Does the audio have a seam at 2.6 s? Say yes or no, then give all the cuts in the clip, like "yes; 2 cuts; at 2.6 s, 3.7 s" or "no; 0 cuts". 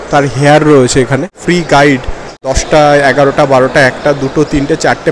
yes; 2 cuts; at 1.3 s, 2.6 s